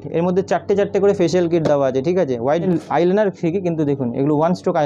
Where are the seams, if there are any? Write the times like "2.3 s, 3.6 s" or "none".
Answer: 2.7 s